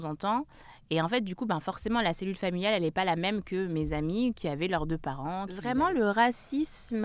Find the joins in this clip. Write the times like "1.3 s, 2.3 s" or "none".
5.5 s

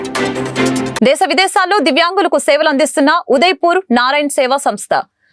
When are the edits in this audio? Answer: 0.9 s

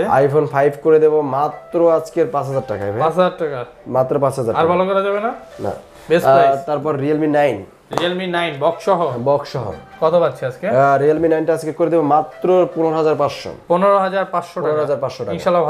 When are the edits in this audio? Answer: none

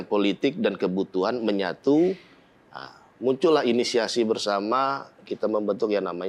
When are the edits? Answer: none

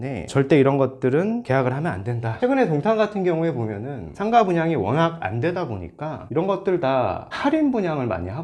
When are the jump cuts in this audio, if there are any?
none

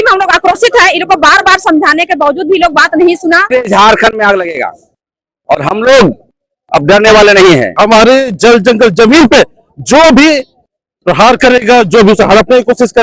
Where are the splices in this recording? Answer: 3.5 s, 7.7 s

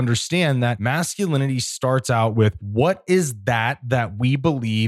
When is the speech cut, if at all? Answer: 0.8 s, 2.6 s

